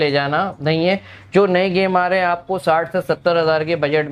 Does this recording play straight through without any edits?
yes; 0 cuts

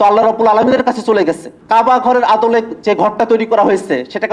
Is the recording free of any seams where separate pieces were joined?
no; 1 cut; at 1.5 s

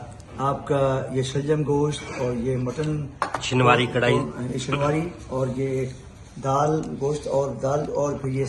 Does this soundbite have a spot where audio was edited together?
no; 0 cuts

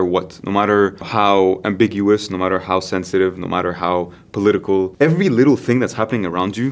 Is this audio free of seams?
no; 2 cuts; at 1.1 s, 4.9 s

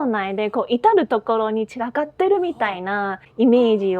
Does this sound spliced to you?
no; 0 cuts

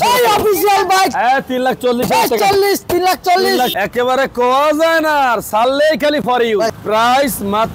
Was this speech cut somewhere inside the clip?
yes; 2 cuts; at 3.7 s, 6.8 s

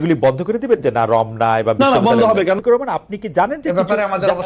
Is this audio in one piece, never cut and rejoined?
no; 1 cut; at 2.6 s

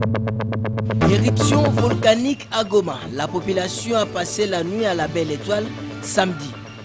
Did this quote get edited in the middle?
yes; 1 cut; at 1.7 s

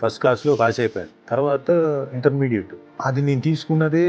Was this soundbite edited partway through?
yes; 2 cuts; at 1.0 s, 2.8 s

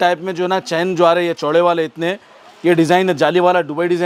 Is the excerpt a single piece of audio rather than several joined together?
yes; 0 cuts

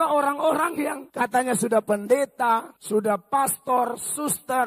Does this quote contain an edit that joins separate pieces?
yes; 2 cuts; at 1.0 s, 2.7 s

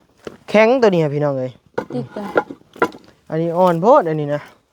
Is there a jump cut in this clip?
no; 0 cuts

